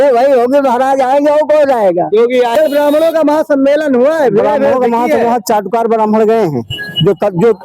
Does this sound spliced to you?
yes; 1 cut; at 2.5 s

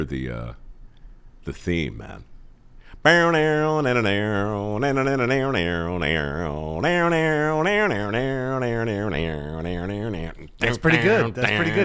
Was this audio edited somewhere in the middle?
no; 0 cuts

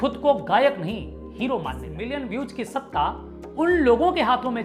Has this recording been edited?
yes; 1 cut; at 1.9 s

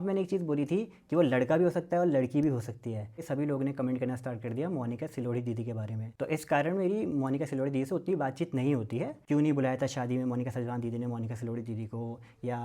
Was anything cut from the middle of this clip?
yes; 3 cuts; at 3.2 s, 6.0 s, 9.1 s

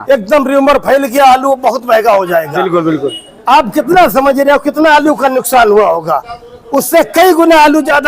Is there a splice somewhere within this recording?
no; 0 cuts

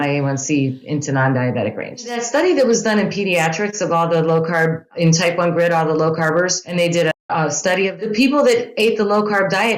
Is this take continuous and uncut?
no; 4 cuts; at 2.1 s, 4.9 s, 6.6 s, 8.0 s

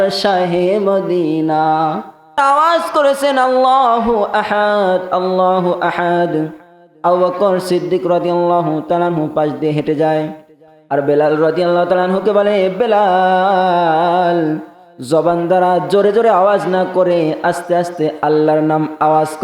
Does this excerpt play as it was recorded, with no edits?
no; 1 cut; at 2.4 s

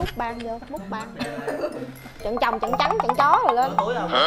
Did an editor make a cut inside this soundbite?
yes; 1 cut; at 1.1 s

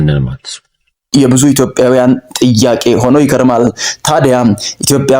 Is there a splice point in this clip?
yes; 1 cut; at 1.1 s

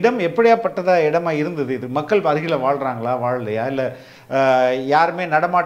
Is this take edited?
no; 0 cuts

